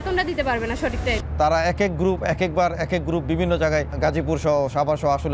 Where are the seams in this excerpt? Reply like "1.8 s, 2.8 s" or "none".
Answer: 1.2 s, 3.9 s